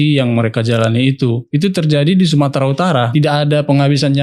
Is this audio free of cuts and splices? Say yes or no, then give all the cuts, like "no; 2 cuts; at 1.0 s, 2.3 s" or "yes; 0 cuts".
no; 2 cuts; at 1.4 s, 3.1 s